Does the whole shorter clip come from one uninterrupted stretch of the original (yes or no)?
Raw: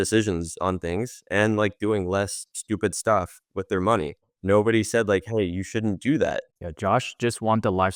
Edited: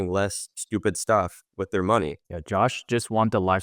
no